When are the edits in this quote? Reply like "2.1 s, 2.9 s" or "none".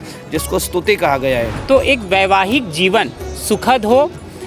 1.6 s